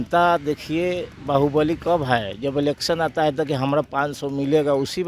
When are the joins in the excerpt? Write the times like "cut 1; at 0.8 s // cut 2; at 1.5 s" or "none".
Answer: none